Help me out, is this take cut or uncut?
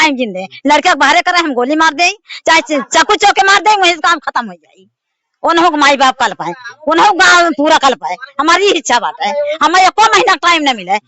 uncut